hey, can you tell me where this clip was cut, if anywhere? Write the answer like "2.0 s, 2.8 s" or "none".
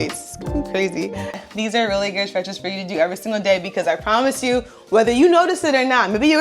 1.2 s